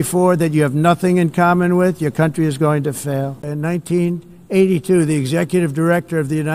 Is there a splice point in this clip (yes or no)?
no